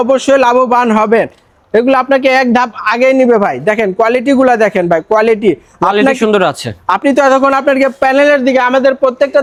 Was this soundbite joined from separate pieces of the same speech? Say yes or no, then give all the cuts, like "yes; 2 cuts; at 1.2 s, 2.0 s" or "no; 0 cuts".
no; 0 cuts